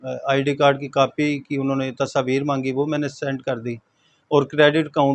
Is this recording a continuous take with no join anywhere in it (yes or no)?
yes